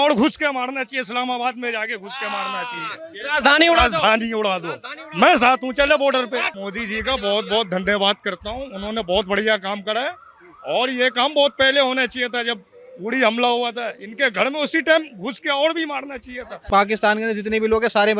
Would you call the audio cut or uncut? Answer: cut